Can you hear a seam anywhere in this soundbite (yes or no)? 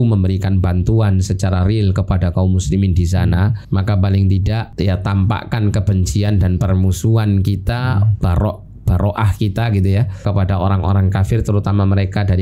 yes